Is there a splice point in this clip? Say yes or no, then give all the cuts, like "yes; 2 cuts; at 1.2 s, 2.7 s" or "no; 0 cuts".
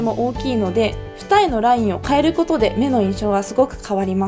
no; 0 cuts